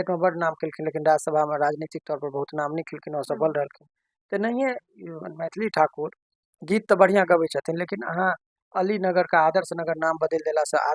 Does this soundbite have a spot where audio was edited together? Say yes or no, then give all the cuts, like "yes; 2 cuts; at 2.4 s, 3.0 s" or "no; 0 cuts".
no; 0 cuts